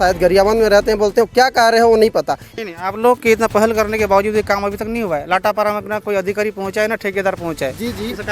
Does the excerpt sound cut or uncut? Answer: cut